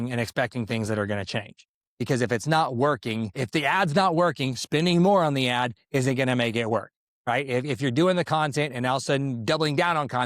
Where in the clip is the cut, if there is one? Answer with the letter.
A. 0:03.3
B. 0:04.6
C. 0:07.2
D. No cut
A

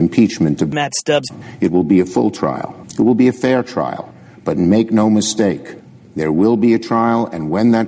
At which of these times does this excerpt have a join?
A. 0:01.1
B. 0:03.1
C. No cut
A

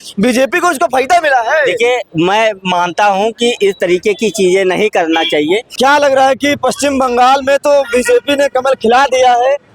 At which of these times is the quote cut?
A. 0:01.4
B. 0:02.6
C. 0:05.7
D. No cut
C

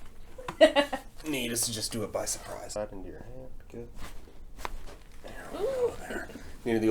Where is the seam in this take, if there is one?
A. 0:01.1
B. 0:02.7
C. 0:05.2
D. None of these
B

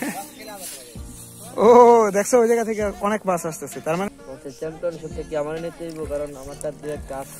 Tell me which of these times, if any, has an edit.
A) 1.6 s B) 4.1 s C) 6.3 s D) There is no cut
B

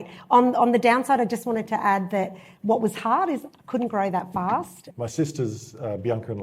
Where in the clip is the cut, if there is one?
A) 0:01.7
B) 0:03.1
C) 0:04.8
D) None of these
C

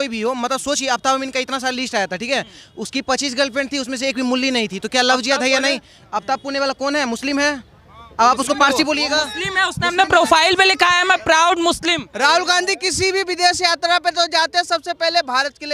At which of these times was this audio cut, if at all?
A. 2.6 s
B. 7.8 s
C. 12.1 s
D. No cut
C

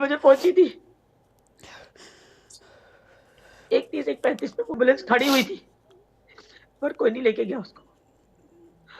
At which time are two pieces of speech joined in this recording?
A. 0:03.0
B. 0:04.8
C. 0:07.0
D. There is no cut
B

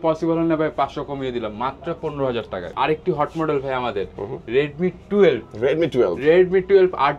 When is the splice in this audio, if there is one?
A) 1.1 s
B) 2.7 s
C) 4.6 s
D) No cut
B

